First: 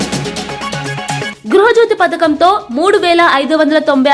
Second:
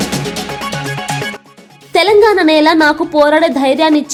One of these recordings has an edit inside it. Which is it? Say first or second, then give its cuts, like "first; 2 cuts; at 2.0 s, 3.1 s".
first; 1 cut; at 1.3 s